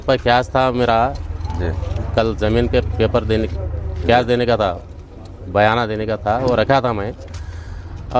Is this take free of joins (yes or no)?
yes